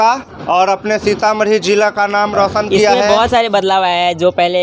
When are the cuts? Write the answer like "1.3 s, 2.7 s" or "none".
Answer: 3.0 s